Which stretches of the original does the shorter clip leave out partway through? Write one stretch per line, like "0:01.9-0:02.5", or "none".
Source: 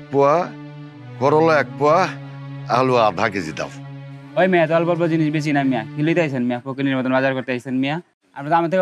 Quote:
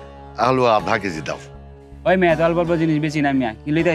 none